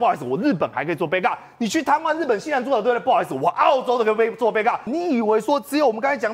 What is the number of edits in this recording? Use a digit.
1